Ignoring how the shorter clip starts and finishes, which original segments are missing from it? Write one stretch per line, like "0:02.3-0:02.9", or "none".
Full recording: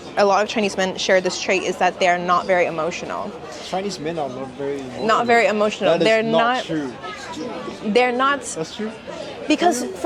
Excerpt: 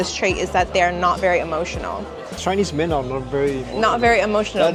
none